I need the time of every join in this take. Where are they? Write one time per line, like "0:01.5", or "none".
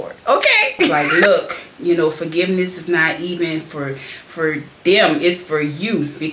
0:00.9